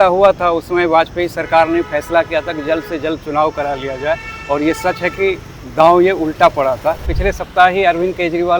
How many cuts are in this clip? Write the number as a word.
one